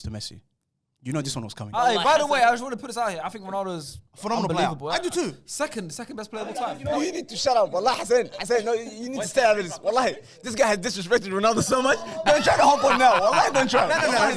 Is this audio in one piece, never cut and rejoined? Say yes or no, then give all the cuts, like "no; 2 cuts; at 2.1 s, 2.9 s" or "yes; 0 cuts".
no; 1 cut; at 1.8 s